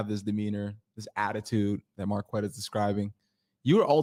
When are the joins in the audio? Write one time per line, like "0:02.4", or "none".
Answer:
none